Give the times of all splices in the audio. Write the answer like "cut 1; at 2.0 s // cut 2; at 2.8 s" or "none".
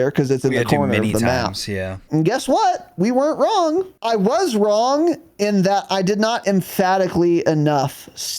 cut 1; at 2.0 s // cut 2; at 4.0 s